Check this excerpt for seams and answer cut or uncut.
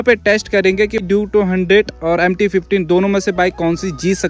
cut